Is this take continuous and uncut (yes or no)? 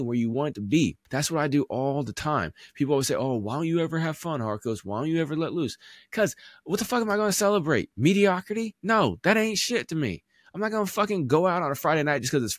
no